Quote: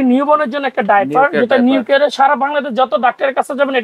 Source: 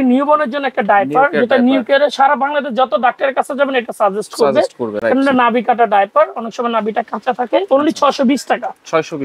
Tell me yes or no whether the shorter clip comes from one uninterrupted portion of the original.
yes